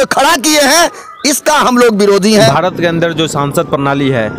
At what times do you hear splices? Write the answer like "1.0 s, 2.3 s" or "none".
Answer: 2.5 s